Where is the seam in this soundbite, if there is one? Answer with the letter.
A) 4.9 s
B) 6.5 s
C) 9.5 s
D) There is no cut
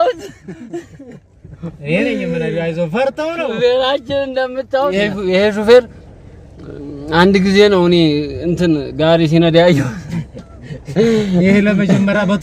A